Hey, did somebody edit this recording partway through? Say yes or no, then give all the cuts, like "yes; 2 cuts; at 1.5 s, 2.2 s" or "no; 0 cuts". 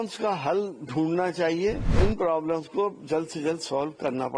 yes; 1 cut; at 2.0 s